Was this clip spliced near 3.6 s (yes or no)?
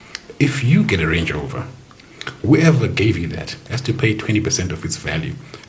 no